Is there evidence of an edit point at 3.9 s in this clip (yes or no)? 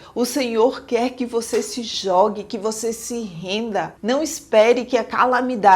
yes